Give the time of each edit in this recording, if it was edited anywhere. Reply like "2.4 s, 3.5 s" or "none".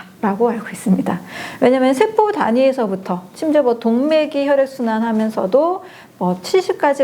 none